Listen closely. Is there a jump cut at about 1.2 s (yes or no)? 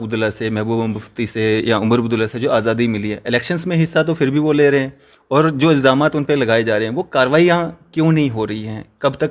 no